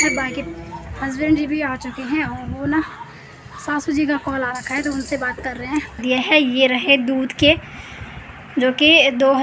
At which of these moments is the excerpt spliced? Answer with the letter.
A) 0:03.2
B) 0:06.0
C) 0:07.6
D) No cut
B